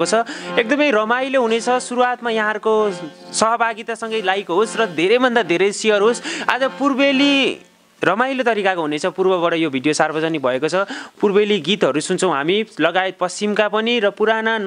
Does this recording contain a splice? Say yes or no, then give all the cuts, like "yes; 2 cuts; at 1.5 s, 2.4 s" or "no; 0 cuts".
no; 0 cuts